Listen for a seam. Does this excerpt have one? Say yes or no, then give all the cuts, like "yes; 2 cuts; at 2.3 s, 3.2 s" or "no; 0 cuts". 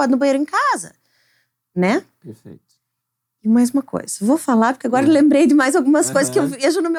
no; 0 cuts